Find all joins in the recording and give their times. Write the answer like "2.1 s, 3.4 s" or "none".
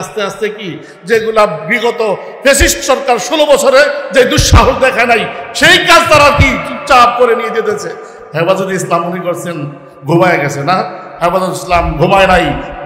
none